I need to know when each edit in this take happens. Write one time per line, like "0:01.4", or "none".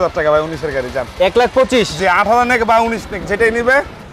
none